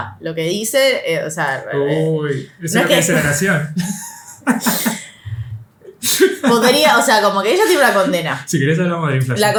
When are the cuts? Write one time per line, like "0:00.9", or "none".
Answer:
none